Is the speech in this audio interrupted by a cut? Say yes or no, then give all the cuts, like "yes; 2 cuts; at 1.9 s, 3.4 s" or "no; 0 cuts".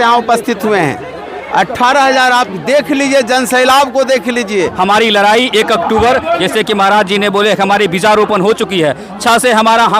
yes; 1 cut; at 4.7 s